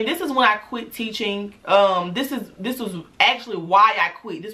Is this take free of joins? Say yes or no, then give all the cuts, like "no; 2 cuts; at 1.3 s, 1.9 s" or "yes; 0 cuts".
yes; 0 cuts